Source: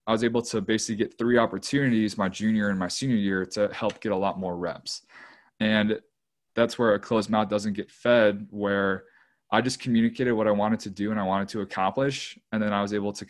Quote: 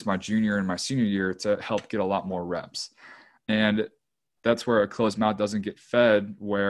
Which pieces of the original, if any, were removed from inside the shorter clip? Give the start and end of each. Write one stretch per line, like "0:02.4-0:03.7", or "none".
none